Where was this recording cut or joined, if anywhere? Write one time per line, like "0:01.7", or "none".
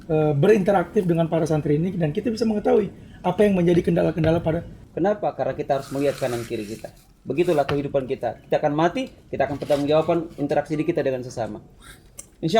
0:04.8